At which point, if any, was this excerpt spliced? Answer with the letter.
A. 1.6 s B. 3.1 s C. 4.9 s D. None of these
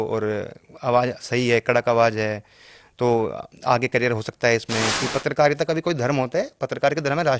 C